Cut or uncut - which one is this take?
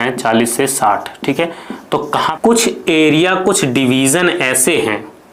cut